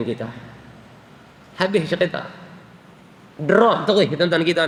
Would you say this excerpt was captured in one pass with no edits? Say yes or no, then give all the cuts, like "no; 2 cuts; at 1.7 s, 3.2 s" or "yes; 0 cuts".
yes; 0 cuts